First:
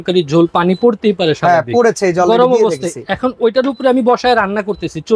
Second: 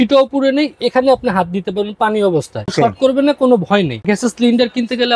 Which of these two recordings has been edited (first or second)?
second